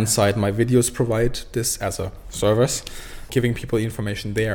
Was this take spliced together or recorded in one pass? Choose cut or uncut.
cut